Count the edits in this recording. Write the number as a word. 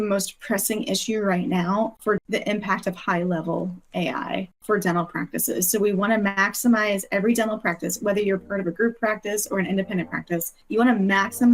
three